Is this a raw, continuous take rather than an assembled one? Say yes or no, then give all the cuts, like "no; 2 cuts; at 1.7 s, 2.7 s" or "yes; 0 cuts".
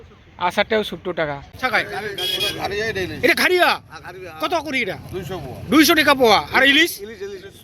no; 1 cut; at 1.6 s